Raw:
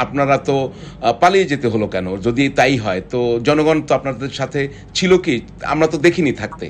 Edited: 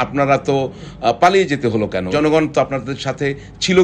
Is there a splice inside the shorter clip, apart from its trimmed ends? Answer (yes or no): yes